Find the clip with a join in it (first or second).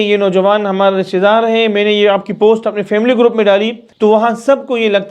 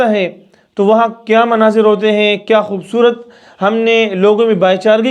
first